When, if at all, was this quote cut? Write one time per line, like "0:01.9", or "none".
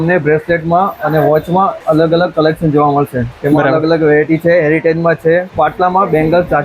0:01.8
0:05.5